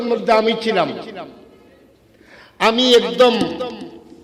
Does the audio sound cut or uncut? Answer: uncut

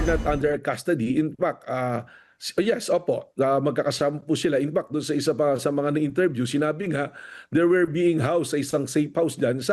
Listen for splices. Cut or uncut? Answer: uncut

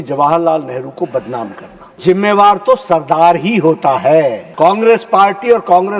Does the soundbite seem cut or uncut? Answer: cut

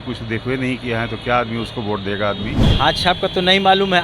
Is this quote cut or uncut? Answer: cut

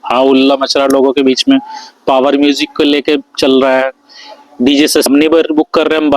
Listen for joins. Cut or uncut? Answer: cut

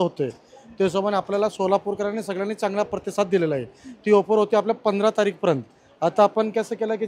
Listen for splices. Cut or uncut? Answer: uncut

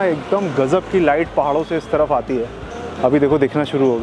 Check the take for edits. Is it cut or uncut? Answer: uncut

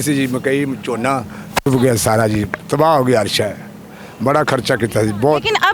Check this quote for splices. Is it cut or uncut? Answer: uncut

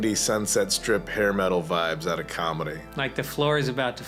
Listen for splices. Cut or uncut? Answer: uncut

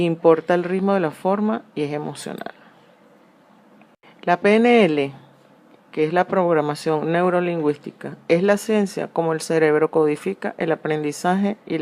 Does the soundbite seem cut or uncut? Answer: cut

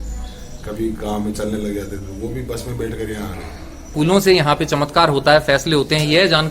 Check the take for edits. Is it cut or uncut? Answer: cut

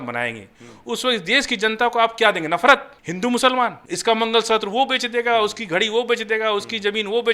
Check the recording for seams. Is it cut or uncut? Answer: cut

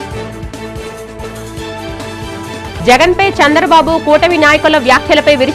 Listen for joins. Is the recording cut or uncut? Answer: cut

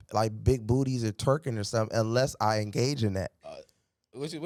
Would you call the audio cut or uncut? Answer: uncut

